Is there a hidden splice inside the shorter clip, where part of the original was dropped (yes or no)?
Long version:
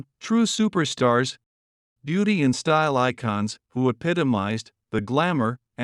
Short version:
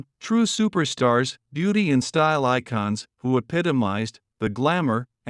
yes